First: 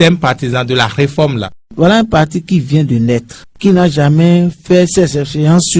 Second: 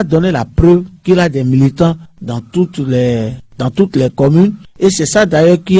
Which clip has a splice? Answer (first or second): first